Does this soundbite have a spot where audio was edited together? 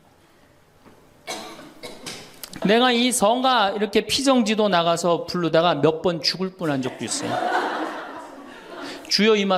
yes; 1 cut; at 2.6 s

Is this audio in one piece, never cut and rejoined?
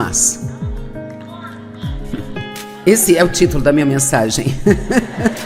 yes; 0 cuts

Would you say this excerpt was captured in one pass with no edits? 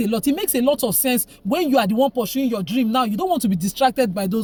yes; 0 cuts

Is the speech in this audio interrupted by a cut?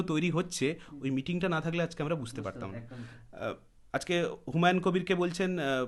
no; 0 cuts

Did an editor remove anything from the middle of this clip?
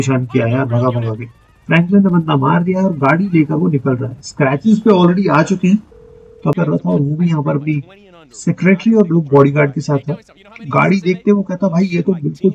yes; 1 cut; at 6.6 s

